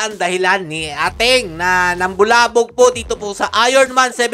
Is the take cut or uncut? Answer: uncut